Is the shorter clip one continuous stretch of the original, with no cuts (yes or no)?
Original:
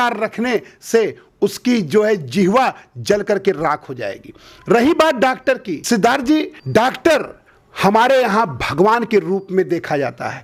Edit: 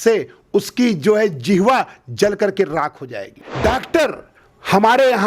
no